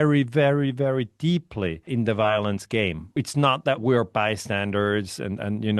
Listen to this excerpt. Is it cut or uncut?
cut